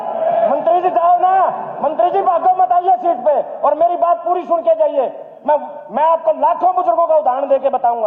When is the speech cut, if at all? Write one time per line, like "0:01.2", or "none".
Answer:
none